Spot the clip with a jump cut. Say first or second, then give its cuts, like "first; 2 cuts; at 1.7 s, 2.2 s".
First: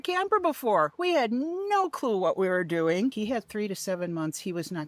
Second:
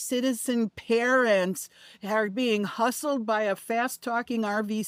first; 1 cut; at 3.1 s